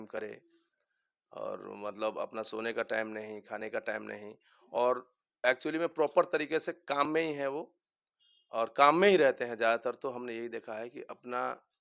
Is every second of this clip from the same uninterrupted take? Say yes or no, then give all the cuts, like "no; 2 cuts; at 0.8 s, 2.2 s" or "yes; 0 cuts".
yes; 0 cuts